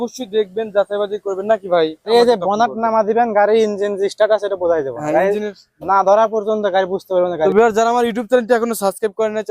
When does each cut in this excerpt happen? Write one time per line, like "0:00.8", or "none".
0:02.1
0:07.5